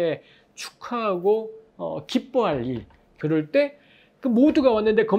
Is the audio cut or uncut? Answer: cut